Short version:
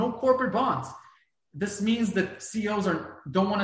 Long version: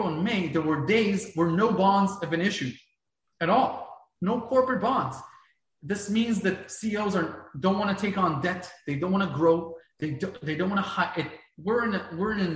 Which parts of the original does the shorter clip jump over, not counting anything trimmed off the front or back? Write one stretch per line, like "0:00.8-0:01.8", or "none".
none